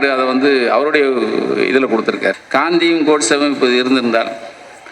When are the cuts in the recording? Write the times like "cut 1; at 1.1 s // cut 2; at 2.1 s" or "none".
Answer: cut 1; at 2.4 s